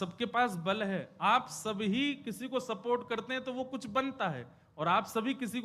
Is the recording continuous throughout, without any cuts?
yes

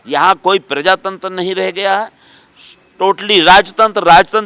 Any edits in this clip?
no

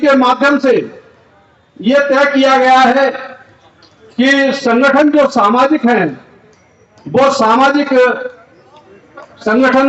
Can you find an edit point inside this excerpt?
no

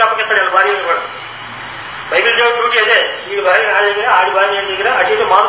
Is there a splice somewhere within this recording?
no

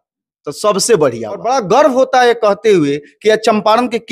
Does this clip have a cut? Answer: yes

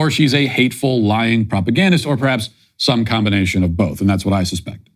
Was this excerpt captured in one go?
yes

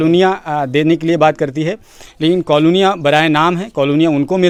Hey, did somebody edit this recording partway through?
no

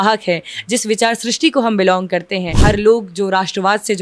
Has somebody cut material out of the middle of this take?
yes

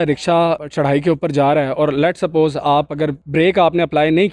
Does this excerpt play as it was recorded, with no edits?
yes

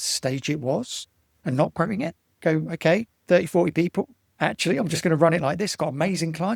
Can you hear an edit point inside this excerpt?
yes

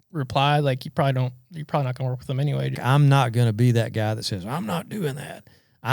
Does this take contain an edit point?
yes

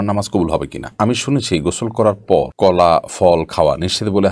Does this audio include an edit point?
yes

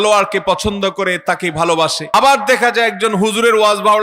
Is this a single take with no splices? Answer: no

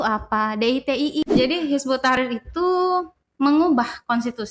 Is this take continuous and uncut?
no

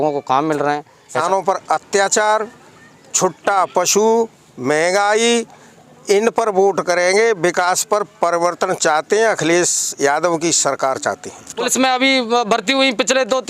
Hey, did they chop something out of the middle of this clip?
yes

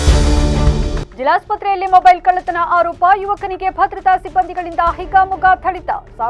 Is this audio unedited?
yes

